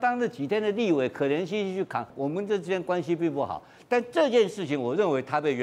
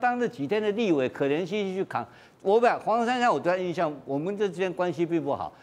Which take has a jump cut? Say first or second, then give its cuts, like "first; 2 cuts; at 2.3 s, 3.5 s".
first; 1 cut; at 2.1 s